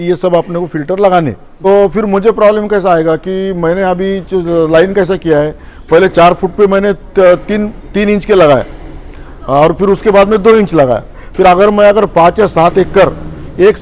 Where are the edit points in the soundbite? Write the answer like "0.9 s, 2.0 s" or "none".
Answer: 1.5 s